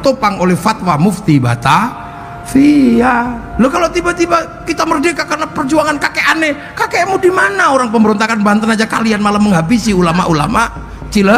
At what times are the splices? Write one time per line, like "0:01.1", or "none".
none